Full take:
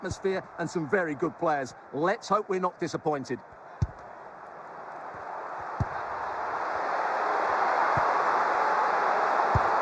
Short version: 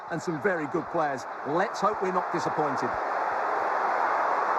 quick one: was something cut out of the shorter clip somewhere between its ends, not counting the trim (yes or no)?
yes